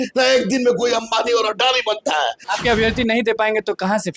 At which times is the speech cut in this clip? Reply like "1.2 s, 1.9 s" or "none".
2.5 s